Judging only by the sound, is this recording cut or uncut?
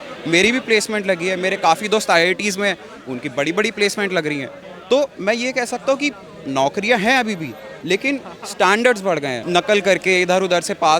cut